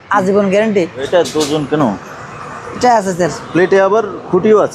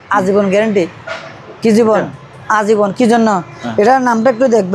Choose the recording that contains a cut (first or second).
first